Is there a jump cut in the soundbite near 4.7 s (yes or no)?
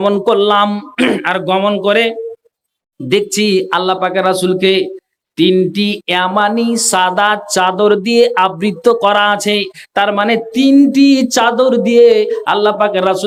no